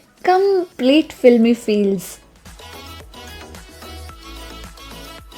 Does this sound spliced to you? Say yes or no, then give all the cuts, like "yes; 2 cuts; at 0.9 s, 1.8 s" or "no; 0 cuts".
yes; 1 cut; at 2.5 s